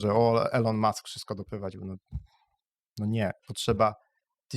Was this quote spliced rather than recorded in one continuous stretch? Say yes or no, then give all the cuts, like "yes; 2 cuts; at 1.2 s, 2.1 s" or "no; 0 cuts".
yes; 1 cut; at 3.5 s